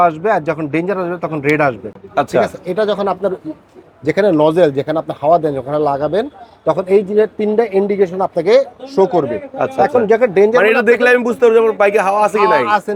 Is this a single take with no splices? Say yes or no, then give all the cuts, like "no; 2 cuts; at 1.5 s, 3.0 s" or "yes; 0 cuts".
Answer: yes; 0 cuts